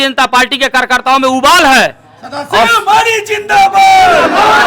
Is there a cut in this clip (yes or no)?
no